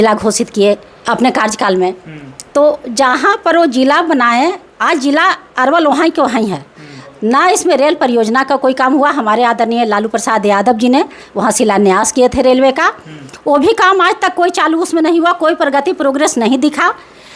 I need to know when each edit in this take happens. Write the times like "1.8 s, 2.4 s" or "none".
1.0 s